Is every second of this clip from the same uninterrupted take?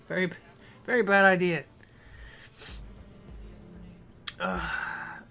yes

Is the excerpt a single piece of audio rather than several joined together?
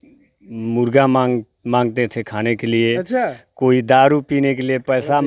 yes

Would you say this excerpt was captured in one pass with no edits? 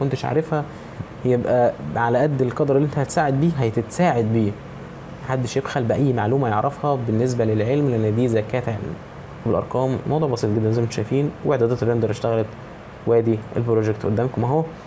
no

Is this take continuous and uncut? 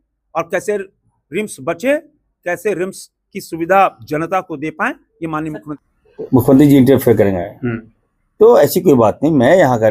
no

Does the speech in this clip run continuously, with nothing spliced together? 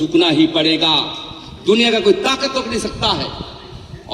yes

